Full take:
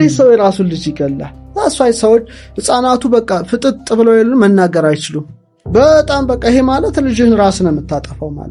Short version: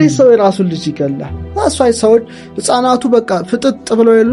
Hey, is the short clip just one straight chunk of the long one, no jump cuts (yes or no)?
yes